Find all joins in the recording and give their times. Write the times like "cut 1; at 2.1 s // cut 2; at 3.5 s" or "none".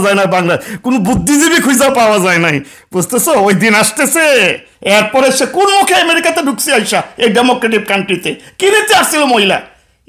cut 1; at 4.7 s